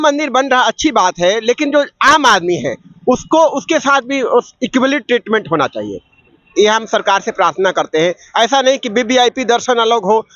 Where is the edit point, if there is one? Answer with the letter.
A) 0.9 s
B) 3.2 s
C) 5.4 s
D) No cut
D